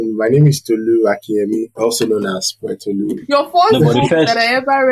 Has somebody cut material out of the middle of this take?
yes; 2 cuts; at 1.7 s, 3.2 s

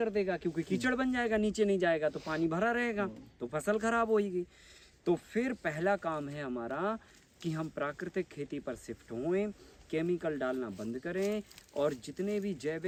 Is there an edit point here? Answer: no; 0 cuts

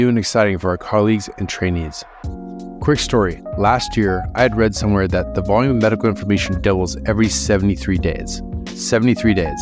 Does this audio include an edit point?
no; 0 cuts

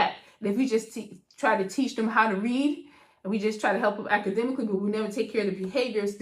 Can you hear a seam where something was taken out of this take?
no; 0 cuts

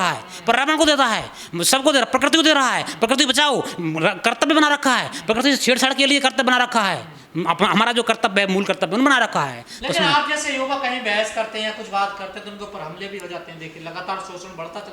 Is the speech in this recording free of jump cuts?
yes; 0 cuts

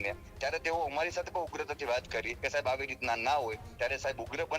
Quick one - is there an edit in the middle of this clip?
yes; 1 cut; at 2.4 s

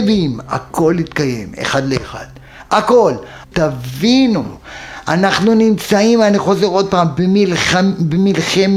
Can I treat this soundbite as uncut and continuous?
yes; 0 cuts

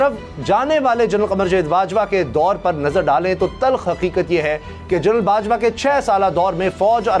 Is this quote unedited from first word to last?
yes; 0 cuts

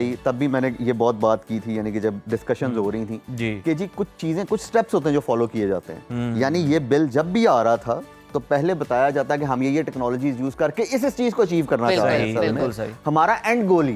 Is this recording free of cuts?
yes; 0 cuts

